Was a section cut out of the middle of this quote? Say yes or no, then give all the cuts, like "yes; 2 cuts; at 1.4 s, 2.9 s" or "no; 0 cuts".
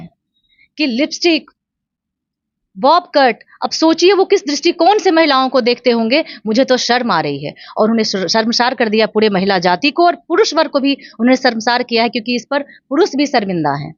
no; 0 cuts